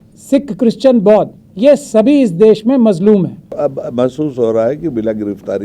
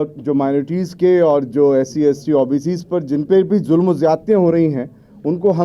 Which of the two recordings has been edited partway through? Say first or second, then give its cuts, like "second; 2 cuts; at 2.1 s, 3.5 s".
first; 1 cut; at 3.6 s